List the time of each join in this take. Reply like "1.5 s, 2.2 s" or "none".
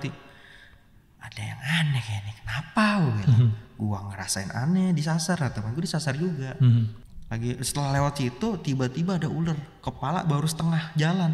7.0 s